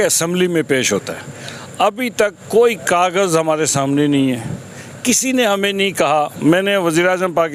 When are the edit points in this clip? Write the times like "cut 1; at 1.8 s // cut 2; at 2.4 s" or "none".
none